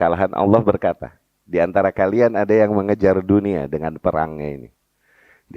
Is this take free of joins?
yes; 0 cuts

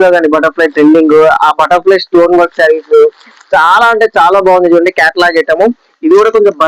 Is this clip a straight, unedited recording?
yes; 0 cuts

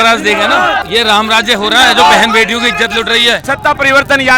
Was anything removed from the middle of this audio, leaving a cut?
yes; 2 cuts; at 0.8 s, 3.4 s

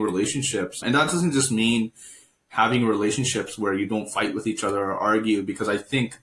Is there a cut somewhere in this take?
no; 0 cuts

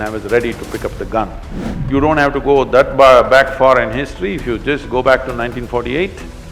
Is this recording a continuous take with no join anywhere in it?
no; 1 cut; at 1.6 s

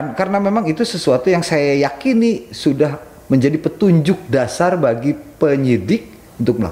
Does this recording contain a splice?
no; 0 cuts

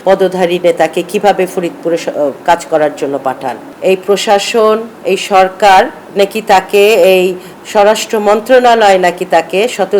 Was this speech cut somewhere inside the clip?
yes; 1 cut; at 3.7 s

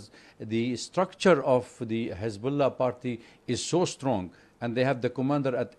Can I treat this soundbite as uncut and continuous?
yes; 0 cuts

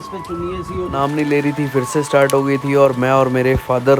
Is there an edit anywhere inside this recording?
yes; 1 cut; at 0.9 s

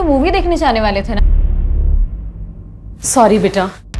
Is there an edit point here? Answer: yes; 1 cut; at 1.2 s

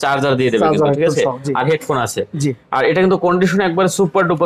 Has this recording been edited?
no; 0 cuts

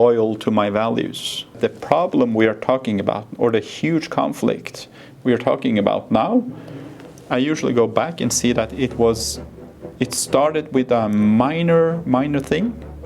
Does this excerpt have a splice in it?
yes; 1 cut; at 1.6 s

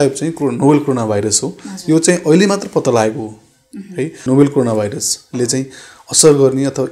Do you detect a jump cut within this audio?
yes; 1 cut; at 4.1 s

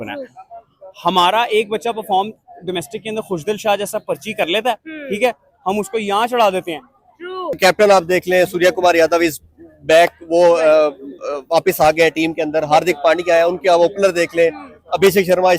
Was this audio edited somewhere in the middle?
yes; 1 cut; at 7.6 s

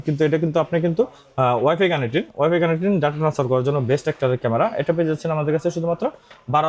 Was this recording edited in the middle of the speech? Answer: no; 0 cuts

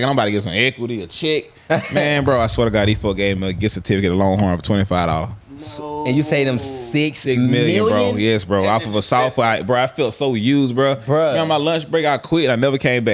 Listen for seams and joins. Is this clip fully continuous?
yes; 0 cuts

